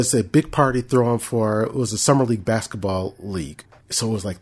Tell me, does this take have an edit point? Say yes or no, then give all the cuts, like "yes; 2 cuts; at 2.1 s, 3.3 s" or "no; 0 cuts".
no; 0 cuts